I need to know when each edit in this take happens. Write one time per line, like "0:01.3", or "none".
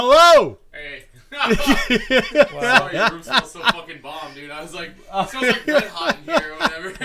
none

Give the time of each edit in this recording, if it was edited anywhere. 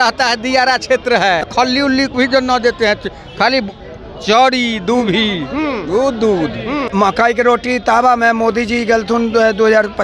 0:01.5
0:06.9

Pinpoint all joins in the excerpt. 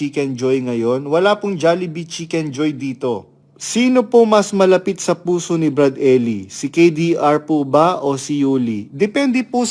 0:03.4

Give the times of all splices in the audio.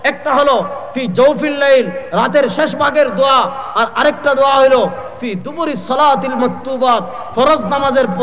none

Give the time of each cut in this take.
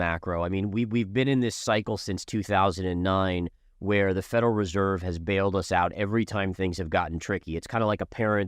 none

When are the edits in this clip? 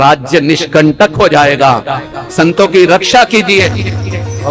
none

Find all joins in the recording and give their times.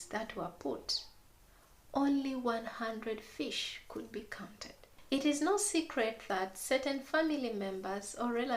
0:04.9

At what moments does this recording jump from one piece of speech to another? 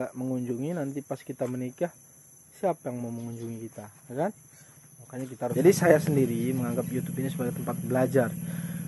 0:05.1

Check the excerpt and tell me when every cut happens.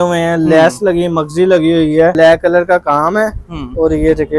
0:02.2

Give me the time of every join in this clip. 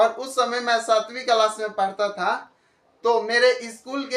none

